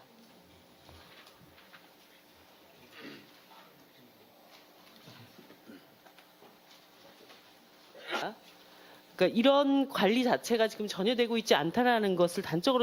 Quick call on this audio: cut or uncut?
uncut